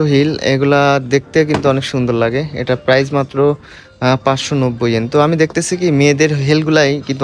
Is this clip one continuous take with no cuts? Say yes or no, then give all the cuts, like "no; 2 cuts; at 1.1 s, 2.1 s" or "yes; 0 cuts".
yes; 0 cuts